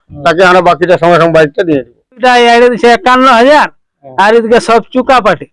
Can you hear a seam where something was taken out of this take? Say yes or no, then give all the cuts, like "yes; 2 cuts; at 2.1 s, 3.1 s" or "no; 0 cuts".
yes; 1 cut; at 2.2 s